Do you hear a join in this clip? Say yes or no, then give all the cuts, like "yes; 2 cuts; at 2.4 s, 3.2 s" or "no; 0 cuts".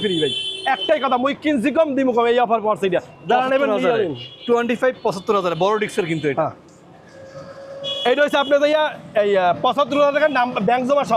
no; 0 cuts